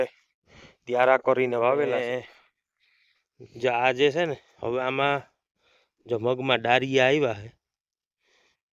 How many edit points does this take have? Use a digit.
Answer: 1